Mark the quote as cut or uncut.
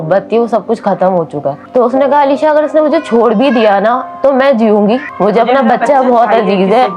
cut